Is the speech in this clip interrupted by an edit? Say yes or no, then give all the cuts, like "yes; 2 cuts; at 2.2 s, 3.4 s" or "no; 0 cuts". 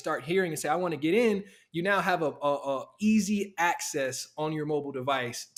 no; 0 cuts